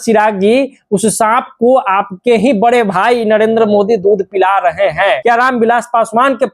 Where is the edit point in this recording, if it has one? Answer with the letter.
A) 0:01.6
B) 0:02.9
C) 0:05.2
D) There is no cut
C